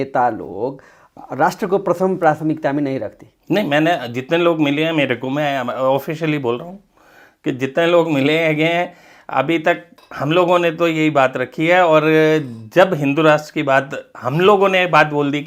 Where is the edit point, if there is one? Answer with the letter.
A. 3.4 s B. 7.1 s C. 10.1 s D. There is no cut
D